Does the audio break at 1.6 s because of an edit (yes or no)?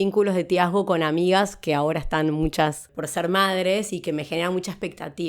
no